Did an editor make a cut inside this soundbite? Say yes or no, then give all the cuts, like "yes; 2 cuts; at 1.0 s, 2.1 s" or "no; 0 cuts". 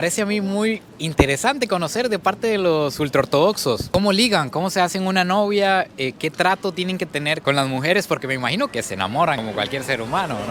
no; 0 cuts